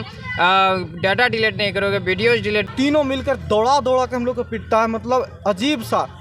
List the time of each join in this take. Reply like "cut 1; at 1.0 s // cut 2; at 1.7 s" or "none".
cut 1; at 2.7 s